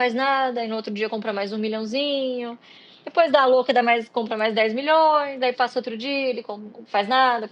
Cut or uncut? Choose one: uncut